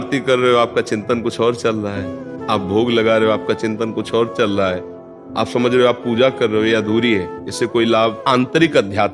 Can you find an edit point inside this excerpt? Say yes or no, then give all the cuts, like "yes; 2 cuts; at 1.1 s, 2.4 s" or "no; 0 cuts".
yes; 2 cuts; at 7.4 s, 8.2 s